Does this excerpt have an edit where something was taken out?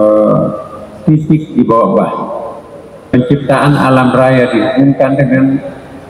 yes; 1 cut; at 3.1 s

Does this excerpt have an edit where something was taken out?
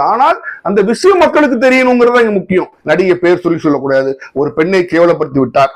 yes; 1 cut; at 2.8 s

